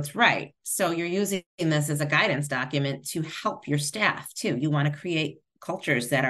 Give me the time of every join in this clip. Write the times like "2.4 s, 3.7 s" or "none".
none